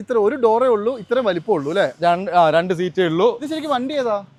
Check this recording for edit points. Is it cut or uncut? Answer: uncut